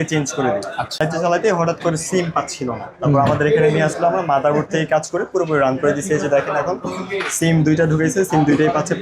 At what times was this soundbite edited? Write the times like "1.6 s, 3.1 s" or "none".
1.0 s